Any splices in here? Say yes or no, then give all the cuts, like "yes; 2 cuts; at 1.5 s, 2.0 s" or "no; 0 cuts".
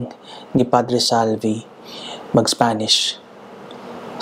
no; 0 cuts